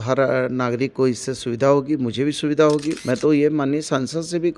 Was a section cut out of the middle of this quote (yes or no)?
yes